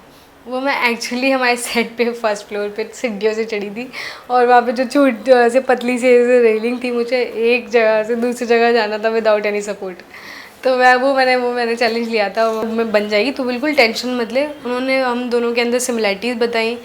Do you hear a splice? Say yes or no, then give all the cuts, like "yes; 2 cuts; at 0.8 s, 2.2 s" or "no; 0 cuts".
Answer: yes; 1 cut; at 12.7 s